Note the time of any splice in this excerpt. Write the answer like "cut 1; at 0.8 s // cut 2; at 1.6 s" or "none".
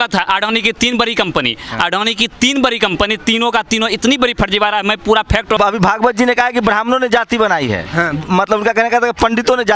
cut 1; at 5.6 s